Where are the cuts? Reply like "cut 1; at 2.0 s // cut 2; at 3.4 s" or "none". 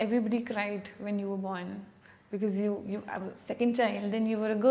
none

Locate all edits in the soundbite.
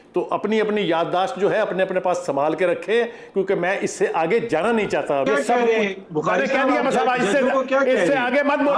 cut 1; at 5.3 s

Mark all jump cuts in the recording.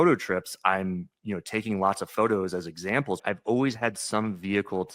cut 1; at 3.2 s

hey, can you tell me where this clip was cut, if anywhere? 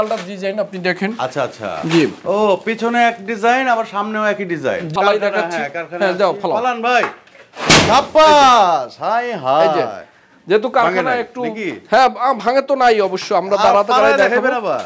cut 1; at 4.9 s

